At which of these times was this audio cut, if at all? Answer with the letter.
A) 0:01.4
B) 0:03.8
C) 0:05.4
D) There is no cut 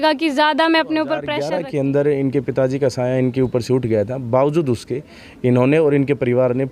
A